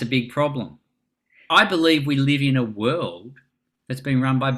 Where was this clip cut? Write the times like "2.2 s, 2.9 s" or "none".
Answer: 1.4 s